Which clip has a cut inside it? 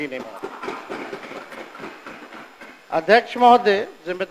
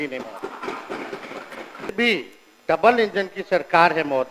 second; 1 cut; at 1.9 s

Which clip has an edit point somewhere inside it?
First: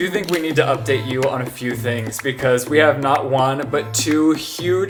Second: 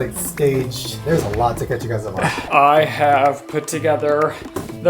second; 2 cuts; at 0.9 s, 2.4 s

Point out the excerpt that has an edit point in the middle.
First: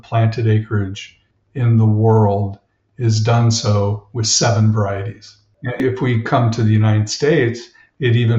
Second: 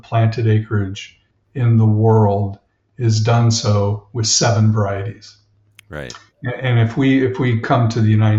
first; 1 cut; at 5.8 s

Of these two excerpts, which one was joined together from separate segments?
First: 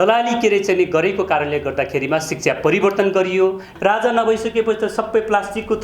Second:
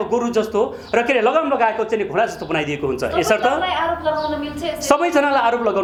first; 1 cut; at 3.7 s

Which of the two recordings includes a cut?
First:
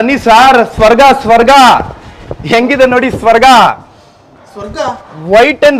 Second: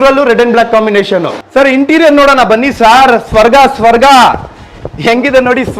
second; 1 cut; at 1.4 s

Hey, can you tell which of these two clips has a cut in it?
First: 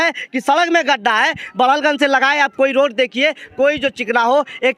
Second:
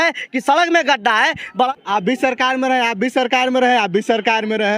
second; 1 cut; at 1.7 s

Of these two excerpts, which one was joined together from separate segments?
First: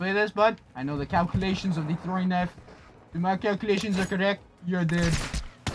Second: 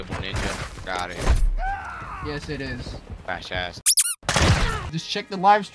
second; 1 cut; at 4.8 s

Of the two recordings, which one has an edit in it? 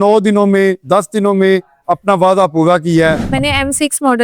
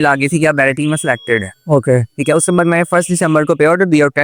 first; 1 cut; at 3.2 s

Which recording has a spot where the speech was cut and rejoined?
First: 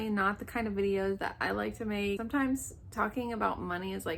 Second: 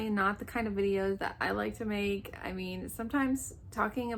first; 1 cut; at 2.2 s

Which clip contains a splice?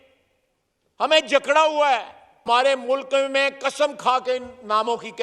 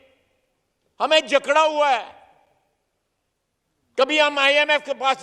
first; 1 cut; at 2.4 s

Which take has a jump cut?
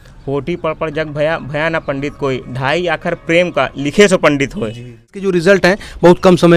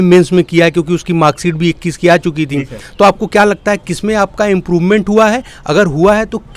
first; 1 cut; at 5.2 s

